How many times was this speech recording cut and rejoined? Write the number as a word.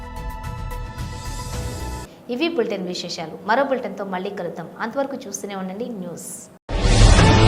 zero